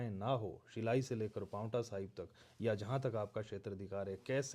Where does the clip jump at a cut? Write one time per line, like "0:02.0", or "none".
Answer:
none